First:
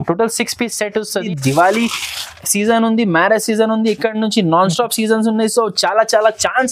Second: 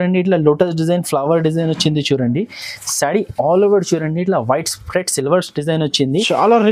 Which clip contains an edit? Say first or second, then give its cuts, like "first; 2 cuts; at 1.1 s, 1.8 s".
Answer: first; 1 cut; at 1.3 s